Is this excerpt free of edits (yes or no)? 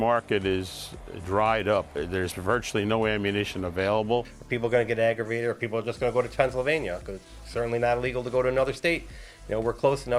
yes